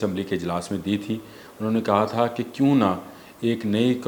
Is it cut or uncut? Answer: uncut